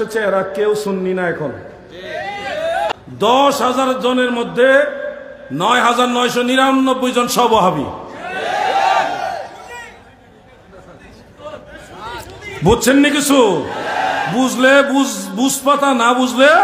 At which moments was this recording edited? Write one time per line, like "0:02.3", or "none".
0:02.9